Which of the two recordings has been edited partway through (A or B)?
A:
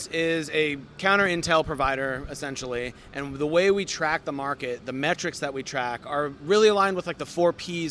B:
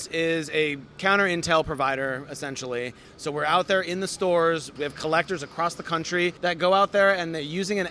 B